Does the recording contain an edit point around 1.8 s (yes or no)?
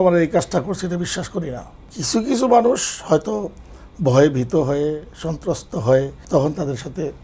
yes